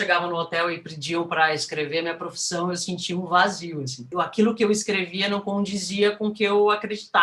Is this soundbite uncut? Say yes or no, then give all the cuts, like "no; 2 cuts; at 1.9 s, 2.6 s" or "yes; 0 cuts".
no; 1 cut; at 4.1 s